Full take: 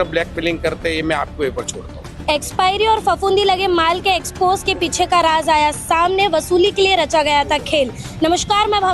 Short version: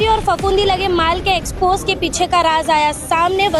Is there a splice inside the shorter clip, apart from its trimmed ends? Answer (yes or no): no